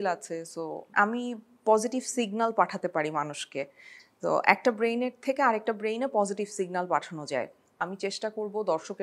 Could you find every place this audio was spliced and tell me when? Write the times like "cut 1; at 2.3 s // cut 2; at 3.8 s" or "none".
cut 1; at 0.9 s // cut 2; at 7.7 s